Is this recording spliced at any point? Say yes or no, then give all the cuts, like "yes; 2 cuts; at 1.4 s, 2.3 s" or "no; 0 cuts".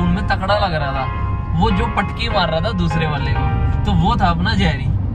no; 0 cuts